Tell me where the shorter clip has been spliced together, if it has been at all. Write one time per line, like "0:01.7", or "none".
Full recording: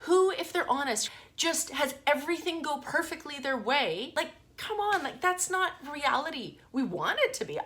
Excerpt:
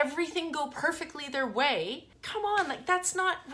0:02.0